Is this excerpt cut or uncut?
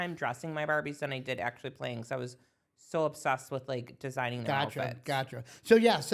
uncut